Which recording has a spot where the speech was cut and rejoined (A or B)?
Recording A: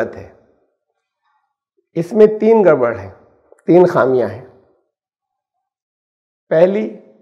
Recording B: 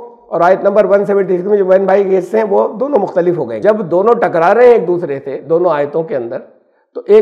B